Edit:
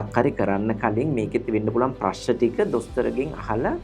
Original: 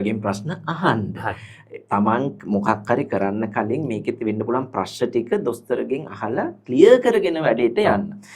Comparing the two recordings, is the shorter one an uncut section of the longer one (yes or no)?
yes